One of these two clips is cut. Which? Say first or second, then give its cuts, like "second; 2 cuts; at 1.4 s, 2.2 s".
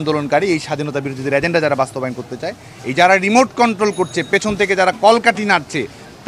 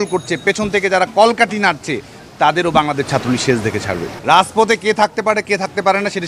second; 1 cut; at 4.1 s